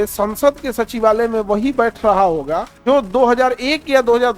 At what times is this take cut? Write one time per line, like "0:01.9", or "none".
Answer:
0:02.7